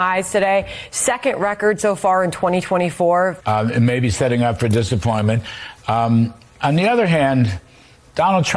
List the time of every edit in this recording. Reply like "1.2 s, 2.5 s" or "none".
3.4 s